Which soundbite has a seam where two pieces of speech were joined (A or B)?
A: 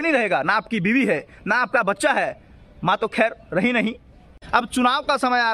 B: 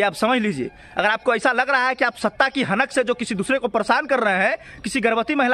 A